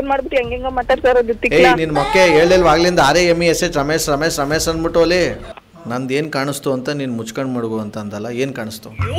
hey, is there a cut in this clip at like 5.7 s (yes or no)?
yes